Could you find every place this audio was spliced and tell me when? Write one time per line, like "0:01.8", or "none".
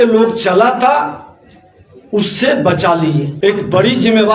0:03.3